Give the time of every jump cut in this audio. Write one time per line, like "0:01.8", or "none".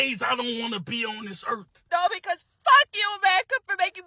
0:01.7